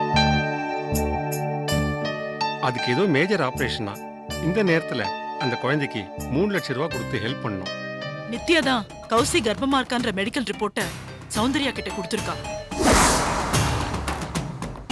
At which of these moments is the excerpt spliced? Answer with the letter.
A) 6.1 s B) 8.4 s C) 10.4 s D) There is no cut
B